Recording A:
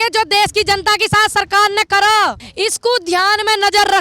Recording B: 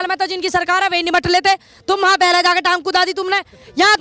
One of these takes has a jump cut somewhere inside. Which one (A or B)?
A